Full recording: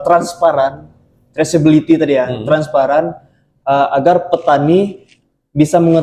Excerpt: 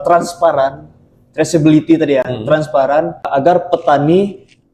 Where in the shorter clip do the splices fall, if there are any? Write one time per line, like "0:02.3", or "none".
0:03.3